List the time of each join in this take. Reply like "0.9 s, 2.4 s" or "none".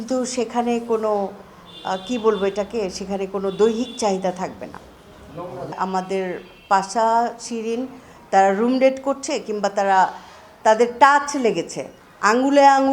5.8 s